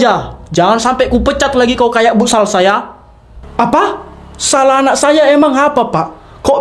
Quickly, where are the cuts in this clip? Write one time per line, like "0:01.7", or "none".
0:03.3